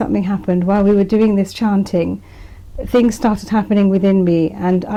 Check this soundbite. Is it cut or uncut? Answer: uncut